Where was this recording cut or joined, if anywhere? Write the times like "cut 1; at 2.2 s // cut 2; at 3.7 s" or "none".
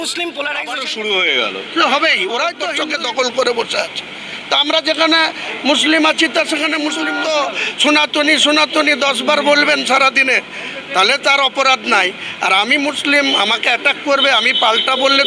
cut 1; at 1.3 s // cut 2; at 2.7 s // cut 3; at 7.0 s